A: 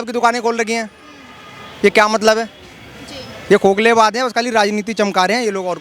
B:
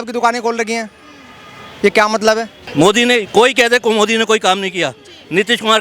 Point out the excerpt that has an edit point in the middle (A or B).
B